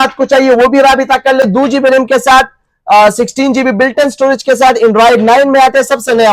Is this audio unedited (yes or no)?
no